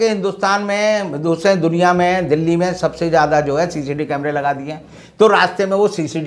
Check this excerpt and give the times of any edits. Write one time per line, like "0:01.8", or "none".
none